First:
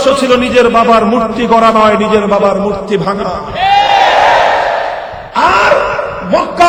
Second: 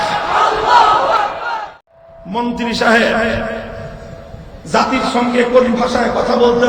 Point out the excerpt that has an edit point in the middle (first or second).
second